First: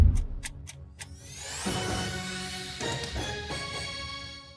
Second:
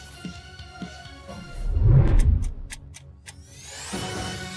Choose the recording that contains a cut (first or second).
second